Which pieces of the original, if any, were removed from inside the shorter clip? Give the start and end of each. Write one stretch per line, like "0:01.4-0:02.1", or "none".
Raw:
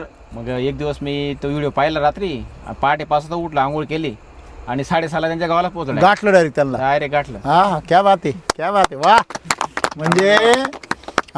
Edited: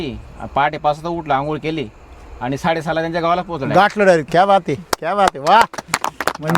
0:06.5-0:07.8